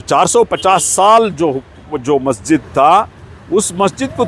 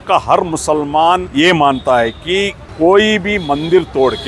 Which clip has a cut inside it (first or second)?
second